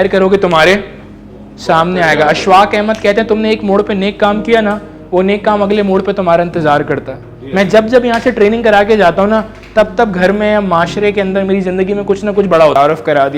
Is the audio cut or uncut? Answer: uncut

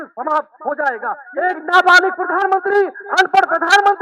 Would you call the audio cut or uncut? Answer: cut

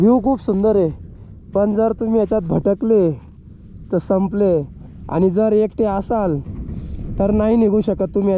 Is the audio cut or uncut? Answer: uncut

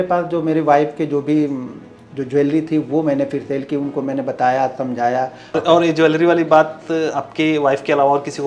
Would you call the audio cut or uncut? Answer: cut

